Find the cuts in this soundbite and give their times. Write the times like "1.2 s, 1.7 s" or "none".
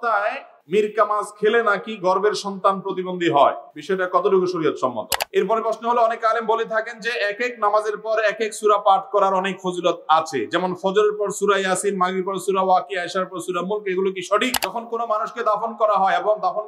5.2 s, 14.6 s